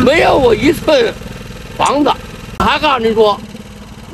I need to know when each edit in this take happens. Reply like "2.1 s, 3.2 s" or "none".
2.5 s